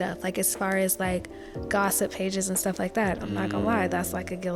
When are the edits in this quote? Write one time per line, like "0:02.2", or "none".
none